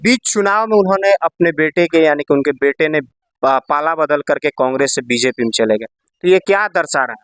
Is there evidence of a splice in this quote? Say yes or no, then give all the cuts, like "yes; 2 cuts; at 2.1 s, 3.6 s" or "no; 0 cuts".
no; 0 cuts